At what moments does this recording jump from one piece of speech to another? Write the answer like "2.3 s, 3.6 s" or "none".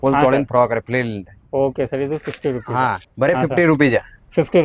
3.0 s